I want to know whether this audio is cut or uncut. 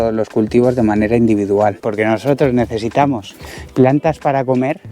cut